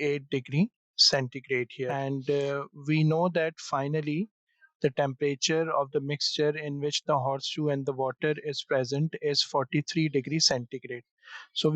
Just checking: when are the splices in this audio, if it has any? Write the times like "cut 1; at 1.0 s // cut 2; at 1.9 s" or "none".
cut 1; at 2.0 s